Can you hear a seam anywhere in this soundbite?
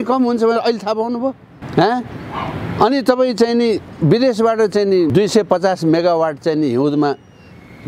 yes; 2 cuts; at 1.5 s, 5.1 s

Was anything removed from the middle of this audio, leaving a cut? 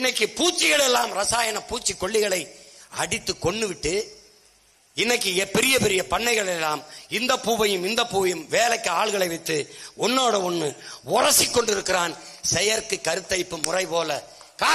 no; 0 cuts

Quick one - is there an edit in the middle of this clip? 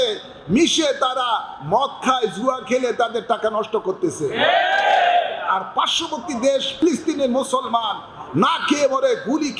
yes; 1 cut; at 6.8 s

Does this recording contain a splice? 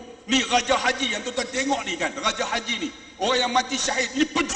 no; 0 cuts

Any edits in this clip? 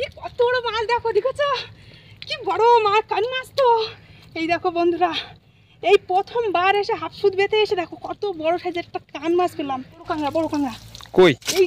yes; 1 cut; at 10.1 s

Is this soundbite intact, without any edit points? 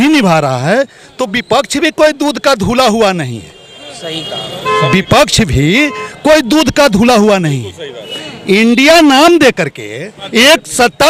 yes; 0 cuts

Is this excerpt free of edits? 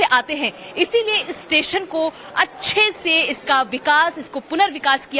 no; 1 cut; at 2.9 s

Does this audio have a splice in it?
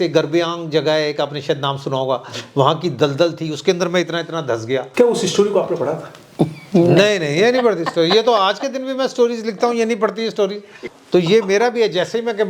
yes; 2 cuts; at 4.9 s, 10.8 s

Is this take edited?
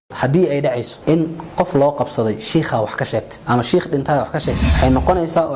yes; 3 cuts; at 0.9 s, 3.3 s, 4.6 s

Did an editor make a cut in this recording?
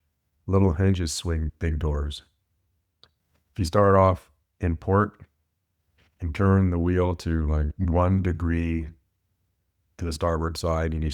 yes; 2 cuts; at 1.5 s, 7.7 s

